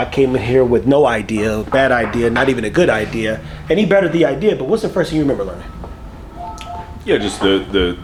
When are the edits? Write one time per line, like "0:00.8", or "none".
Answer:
none